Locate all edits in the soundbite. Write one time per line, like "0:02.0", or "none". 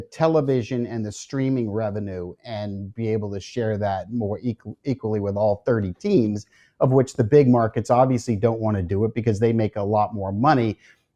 none